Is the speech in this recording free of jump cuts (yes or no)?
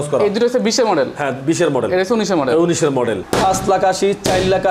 no